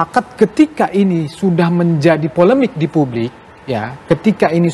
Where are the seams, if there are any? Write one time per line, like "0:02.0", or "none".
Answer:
none